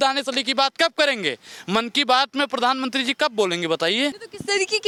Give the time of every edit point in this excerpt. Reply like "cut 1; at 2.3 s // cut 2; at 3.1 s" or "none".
none